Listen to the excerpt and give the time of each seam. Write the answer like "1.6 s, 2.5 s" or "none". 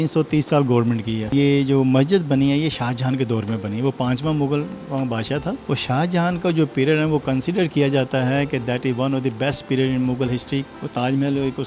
1.3 s, 5.6 s, 10.6 s

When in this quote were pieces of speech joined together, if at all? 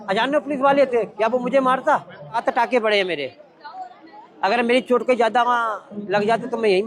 2.4 s

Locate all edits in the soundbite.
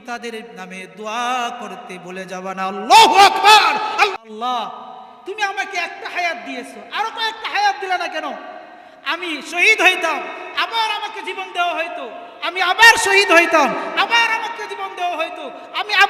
4.3 s

